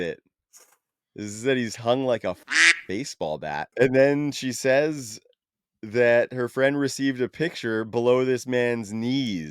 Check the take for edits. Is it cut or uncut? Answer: cut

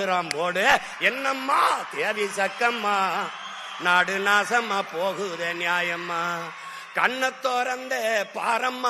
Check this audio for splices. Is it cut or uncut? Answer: uncut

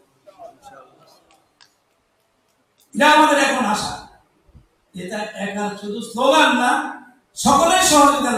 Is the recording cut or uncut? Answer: uncut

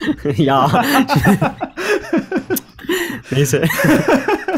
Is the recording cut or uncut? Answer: uncut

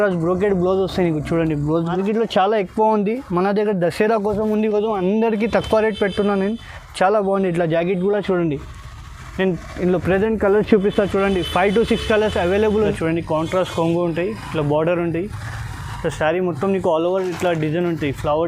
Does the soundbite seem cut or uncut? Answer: cut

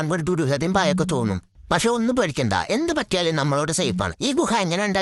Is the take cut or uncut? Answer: uncut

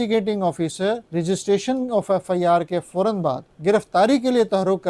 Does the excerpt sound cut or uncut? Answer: cut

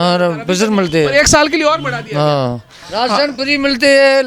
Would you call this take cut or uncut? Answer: cut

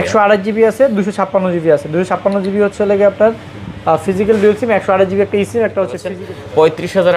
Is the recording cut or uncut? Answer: cut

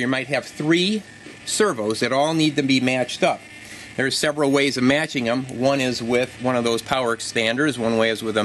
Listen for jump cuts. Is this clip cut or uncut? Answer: uncut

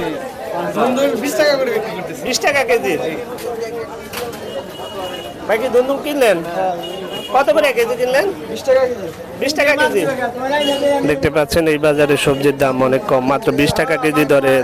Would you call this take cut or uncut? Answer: uncut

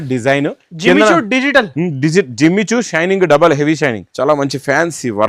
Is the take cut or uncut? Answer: cut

